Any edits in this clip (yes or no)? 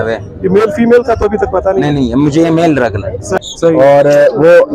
yes